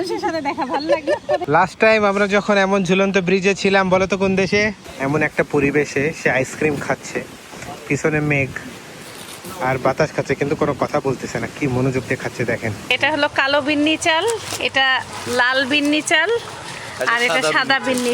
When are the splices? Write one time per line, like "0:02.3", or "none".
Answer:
0:01.4
0:04.9
0:12.9